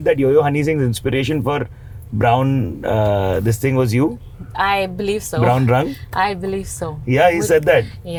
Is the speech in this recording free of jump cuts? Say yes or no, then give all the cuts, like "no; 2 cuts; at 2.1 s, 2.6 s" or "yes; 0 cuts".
yes; 0 cuts